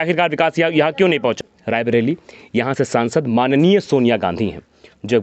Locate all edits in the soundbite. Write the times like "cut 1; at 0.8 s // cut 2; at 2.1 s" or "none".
cut 1; at 1.4 s

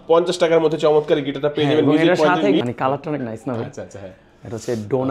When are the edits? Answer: cut 1; at 2.6 s

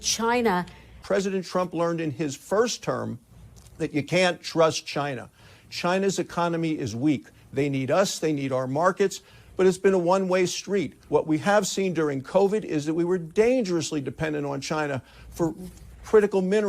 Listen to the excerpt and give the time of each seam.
cut 1; at 1.0 s // cut 2; at 11.0 s

